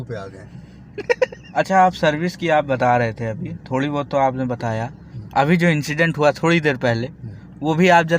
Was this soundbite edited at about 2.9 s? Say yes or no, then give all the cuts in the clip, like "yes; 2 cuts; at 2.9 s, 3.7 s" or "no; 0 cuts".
no; 1 cut; at 1.4 s